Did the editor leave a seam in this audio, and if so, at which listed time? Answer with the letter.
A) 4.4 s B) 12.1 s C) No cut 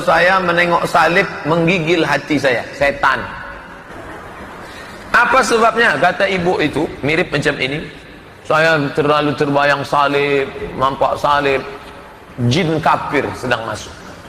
C